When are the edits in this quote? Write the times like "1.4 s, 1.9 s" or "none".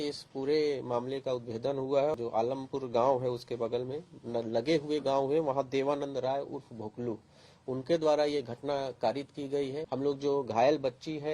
2.1 s, 9.8 s